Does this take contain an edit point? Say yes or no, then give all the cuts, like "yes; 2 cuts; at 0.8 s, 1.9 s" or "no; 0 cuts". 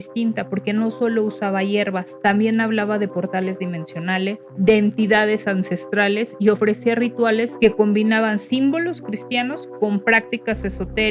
yes; 2 cuts; at 4.5 s, 7.5 s